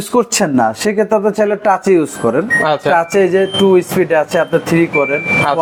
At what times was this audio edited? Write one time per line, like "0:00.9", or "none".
none